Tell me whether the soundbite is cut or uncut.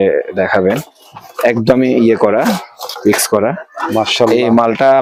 uncut